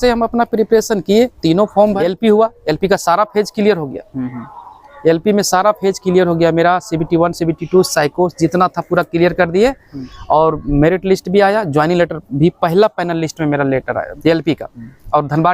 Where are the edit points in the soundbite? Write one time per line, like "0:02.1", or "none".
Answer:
0:02.0
0:14.1